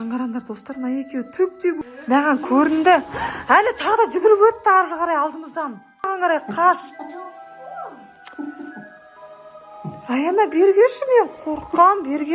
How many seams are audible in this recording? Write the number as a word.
two